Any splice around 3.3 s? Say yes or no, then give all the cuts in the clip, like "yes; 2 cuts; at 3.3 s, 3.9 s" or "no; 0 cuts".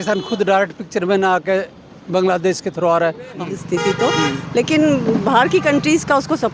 yes; 1 cut; at 3.3 s